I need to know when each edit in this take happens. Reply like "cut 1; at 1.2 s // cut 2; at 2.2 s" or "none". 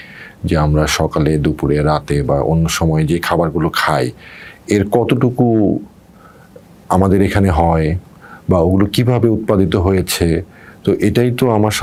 none